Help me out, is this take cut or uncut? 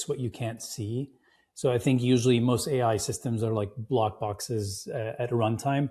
uncut